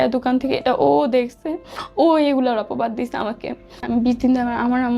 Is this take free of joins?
no; 1 cut; at 3.8 s

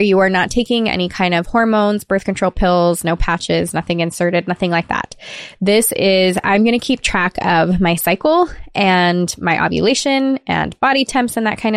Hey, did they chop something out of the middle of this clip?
no; 0 cuts

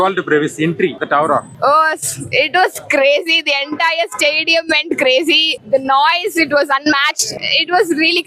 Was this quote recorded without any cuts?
no; 3 cuts; at 1.2 s, 5.5 s, 7.3 s

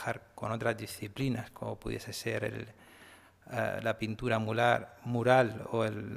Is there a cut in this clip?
yes; 1 cut; at 1.2 s

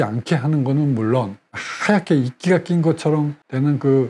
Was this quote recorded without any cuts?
no; 1 cut; at 1.5 s

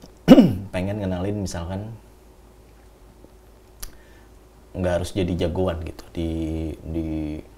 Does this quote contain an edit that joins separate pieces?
no; 0 cuts

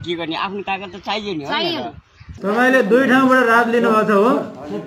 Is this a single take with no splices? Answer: no; 1 cut; at 2.3 s

